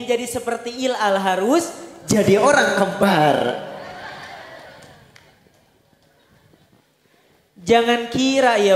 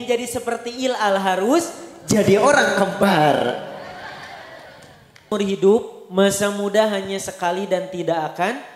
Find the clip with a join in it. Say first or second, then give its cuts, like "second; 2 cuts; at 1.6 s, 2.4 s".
second; 1 cut; at 5.3 s